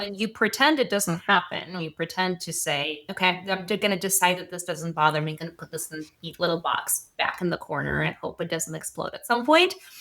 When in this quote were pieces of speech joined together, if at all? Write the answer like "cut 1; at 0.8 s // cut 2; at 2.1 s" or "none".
cut 1; at 3.0 s